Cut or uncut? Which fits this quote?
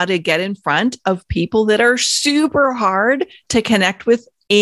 uncut